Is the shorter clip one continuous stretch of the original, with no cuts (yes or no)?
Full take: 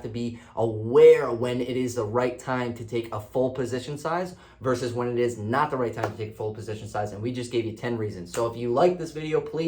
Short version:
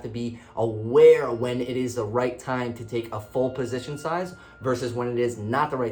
yes